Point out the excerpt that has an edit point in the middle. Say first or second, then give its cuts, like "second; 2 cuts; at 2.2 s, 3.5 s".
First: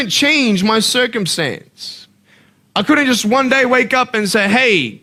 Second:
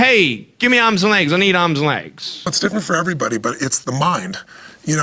second; 1 cut; at 2.5 s